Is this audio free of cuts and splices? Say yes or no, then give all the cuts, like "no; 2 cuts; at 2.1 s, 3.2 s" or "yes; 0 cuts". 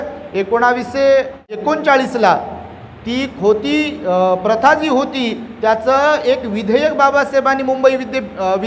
no; 1 cut; at 1.6 s